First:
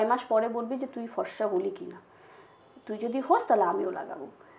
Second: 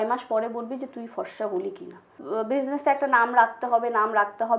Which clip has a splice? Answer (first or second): second